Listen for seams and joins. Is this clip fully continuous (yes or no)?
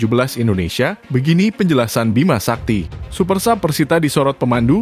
no